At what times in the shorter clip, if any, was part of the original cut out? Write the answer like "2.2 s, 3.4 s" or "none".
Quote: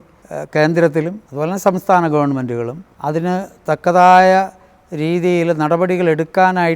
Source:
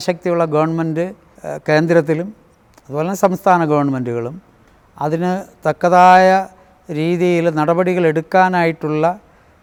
1.2 s, 2.8 s